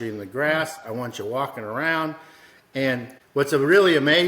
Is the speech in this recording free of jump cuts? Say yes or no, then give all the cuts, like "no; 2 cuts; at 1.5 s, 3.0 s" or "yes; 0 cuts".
no; 1 cut; at 3.2 s